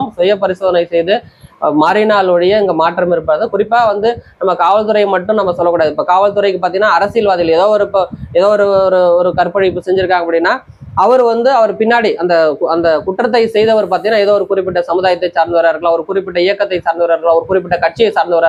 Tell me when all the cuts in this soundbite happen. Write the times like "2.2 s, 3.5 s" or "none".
none